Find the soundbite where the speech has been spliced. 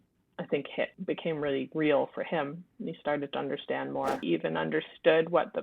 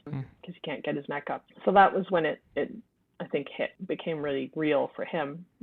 first; 1 cut; at 4.2 s

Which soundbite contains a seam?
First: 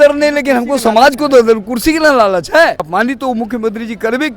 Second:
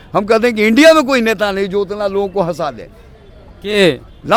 first; 1 cut; at 2.8 s

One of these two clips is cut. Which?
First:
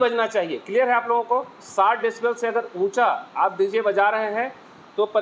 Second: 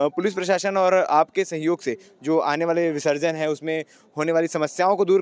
first; 1 cut; at 1.6 s

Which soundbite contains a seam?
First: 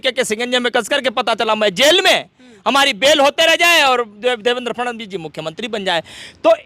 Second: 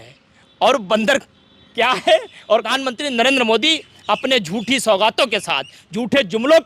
second; 1 cut; at 2.7 s

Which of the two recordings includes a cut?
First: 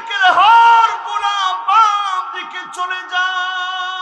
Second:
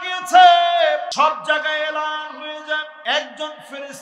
second; 2 cuts; at 1.1 s, 2.9 s

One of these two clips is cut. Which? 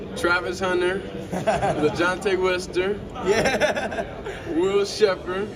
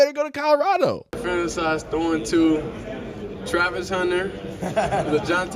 second; 1 cut; at 1.5 s

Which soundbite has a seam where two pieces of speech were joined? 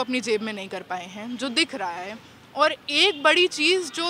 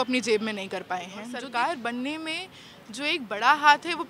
second; 1 cut; at 1.3 s

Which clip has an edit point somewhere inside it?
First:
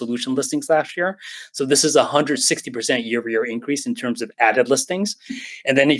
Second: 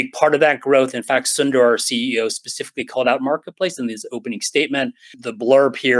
second; 1 cut; at 5.1 s

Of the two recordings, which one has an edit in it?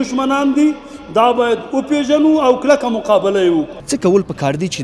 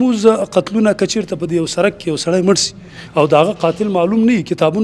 first; 1 cut; at 3.8 s

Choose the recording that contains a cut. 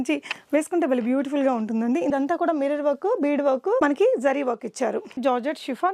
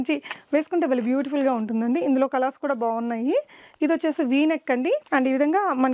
first; 2 cuts; at 2.1 s, 5.2 s

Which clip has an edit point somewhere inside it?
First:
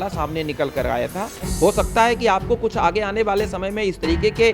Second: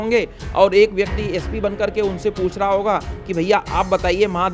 first; 1 cut; at 1.4 s

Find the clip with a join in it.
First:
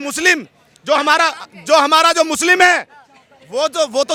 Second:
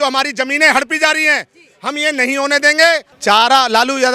second; 1 cut; at 3.1 s

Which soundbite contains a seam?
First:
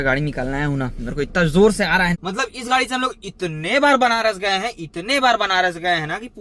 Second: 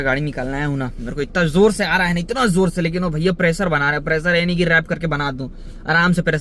first; 1 cut; at 2.2 s

